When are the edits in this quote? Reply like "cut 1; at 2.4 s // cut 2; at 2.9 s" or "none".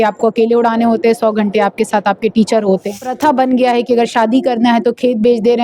cut 1; at 3.0 s